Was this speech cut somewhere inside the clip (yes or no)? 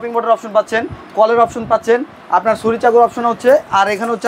no